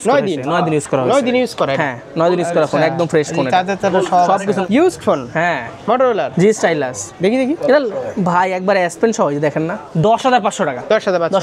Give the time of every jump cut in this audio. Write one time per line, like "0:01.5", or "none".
0:04.6
0:09.8